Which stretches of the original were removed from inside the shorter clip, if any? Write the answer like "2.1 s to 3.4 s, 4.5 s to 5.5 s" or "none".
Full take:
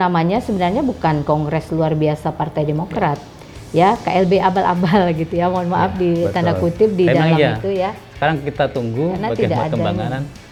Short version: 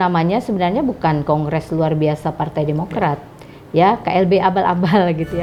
none